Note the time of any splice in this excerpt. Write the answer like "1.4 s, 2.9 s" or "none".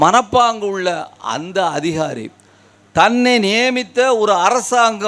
none